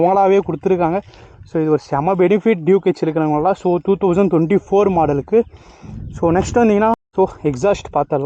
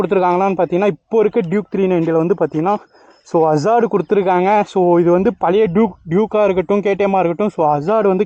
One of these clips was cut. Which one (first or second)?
first